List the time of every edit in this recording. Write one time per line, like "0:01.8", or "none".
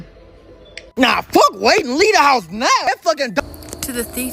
0:03.4